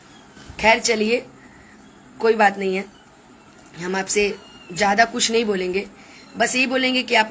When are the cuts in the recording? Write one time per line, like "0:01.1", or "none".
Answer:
none